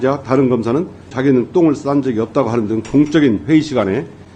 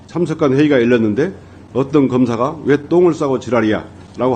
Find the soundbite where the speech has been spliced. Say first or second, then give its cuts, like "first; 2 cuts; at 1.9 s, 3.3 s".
first; 1 cut; at 1.1 s